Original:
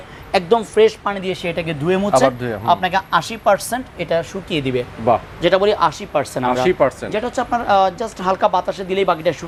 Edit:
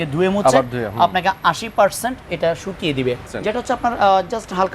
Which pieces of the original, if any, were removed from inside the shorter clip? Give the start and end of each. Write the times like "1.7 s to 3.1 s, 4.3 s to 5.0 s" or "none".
5.0 s to 7.0 s